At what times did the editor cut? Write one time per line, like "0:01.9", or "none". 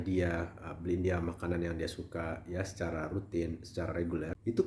none